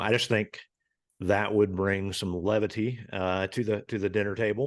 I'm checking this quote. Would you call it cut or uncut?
uncut